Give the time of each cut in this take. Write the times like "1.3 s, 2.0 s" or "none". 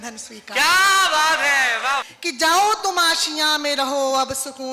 2.0 s